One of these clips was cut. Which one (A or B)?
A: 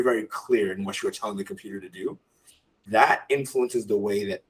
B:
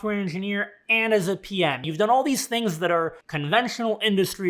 B